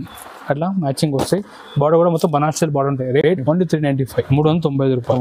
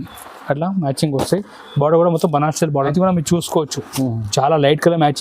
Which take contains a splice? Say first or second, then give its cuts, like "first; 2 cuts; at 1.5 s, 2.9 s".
second; 1 cut; at 2.9 s